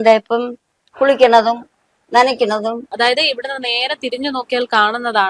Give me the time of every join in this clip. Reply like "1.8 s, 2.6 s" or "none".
2.9 s